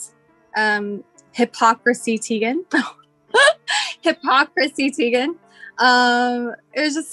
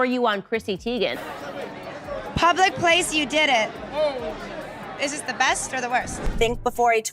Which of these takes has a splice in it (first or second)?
second